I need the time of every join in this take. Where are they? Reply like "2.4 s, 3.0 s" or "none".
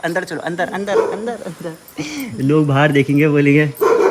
none

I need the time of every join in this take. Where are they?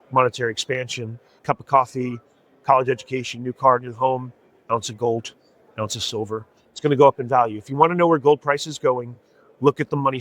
1.3 s

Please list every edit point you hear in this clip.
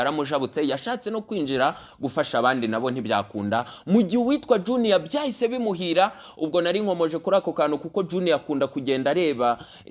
none

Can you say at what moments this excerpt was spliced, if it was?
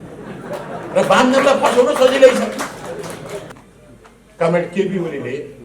3.5 s

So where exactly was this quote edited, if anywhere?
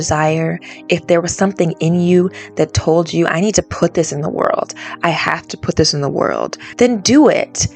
6.6 s

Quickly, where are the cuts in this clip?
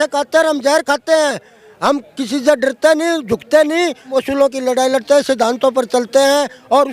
4.1 s

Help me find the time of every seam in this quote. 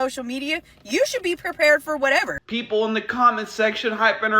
2.4 s

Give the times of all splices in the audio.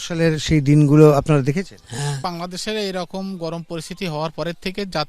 2.2 s

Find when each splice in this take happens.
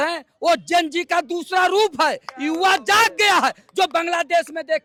none

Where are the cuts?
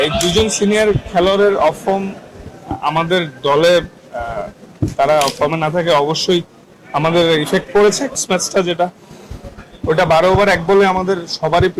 8.2 s

